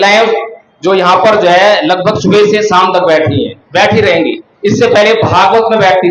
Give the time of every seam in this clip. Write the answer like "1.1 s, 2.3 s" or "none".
none